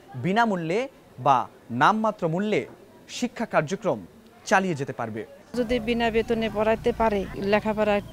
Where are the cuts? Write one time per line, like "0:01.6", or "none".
0:05.4
0:07.4